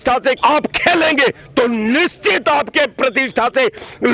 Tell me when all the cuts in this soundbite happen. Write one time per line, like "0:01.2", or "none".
none